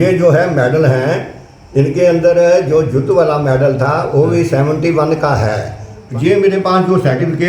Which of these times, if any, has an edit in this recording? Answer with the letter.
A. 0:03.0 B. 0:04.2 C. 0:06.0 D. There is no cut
C